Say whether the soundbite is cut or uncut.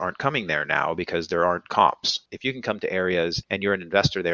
cut